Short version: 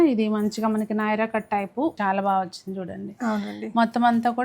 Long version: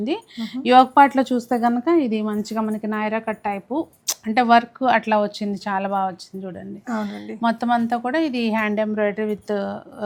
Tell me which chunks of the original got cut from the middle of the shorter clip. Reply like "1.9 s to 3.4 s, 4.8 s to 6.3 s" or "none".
3.9 s to 5.6 s